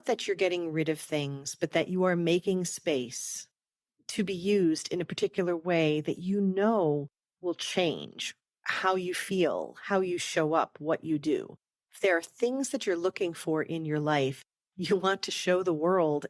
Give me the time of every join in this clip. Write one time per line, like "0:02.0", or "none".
none